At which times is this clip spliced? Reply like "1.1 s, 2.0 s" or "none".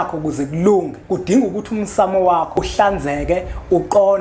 1.0 s, 2.6 s